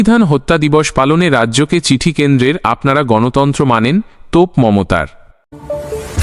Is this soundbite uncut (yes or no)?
no